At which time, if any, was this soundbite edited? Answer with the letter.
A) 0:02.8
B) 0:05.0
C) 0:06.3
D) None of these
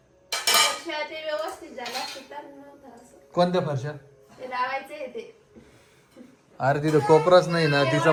D